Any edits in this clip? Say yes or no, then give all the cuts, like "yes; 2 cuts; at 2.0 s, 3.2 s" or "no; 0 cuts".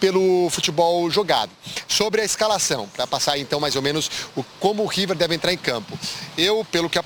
no; 0 cuts